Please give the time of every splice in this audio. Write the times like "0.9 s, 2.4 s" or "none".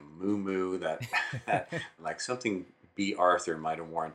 2.0 s